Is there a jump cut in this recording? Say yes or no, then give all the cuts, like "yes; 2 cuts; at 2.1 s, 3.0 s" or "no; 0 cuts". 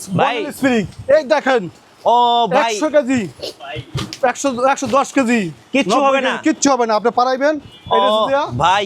no; 0 cuts